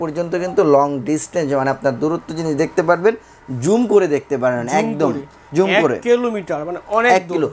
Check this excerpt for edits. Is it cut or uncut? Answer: uncut